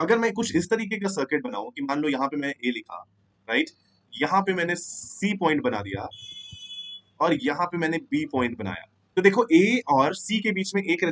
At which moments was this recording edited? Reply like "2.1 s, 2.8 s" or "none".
none